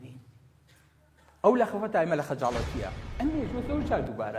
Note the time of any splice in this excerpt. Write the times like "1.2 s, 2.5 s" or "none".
3.0 s

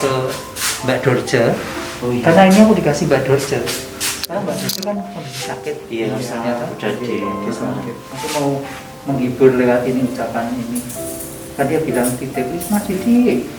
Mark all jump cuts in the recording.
none

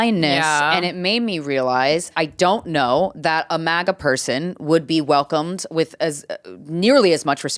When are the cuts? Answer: 2.2 s

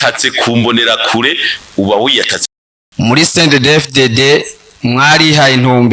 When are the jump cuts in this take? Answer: 2.5 s

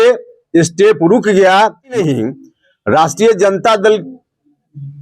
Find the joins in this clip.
2.0 s

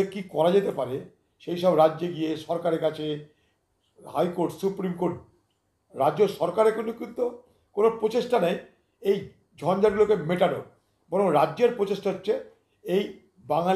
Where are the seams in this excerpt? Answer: none

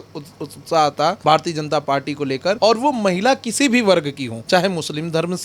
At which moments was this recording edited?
1.2 s, 2.6 s, 4.3 s

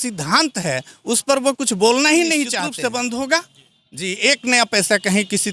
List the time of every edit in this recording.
2.6 s

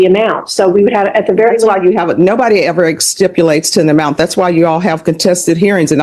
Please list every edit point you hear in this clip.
none

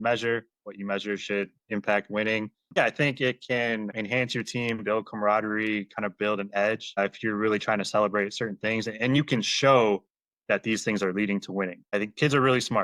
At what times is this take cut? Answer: 2.7 s

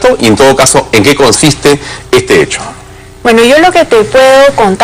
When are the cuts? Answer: none

